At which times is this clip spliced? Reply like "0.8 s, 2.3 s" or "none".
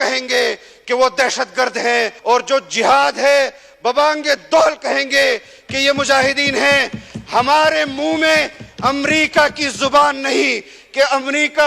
2.1 s